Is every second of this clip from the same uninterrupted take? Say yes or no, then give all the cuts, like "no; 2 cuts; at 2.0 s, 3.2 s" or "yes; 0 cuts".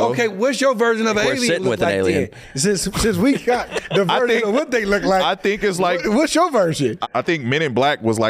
yes; 0 cuts